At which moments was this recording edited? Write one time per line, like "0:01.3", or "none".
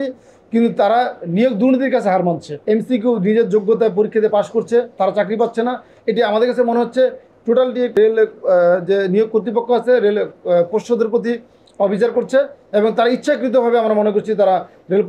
0:02.5
0:08.0

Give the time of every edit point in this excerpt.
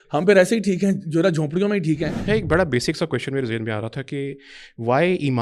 0:02.2

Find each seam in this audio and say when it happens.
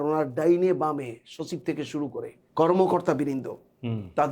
0:02.4

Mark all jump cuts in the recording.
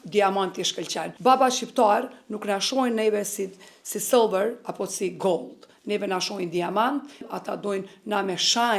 0:01.1
0:07.2

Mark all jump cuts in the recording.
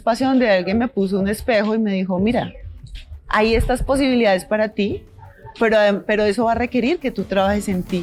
none

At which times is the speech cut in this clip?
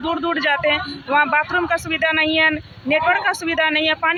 none

